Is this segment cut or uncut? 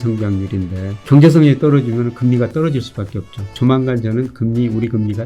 cut